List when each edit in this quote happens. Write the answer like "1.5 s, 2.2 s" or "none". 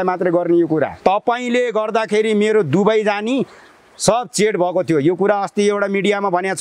1.0 s